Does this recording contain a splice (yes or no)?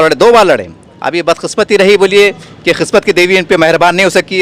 no